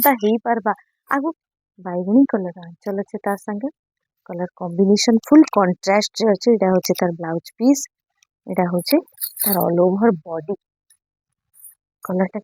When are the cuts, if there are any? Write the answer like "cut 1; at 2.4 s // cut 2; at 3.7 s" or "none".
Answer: cut 1; at 1.3 s